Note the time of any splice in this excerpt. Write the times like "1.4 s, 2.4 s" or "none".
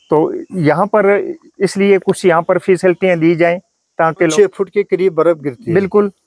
4.3 s